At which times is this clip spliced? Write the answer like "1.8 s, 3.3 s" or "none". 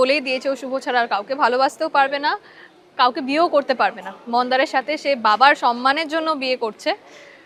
none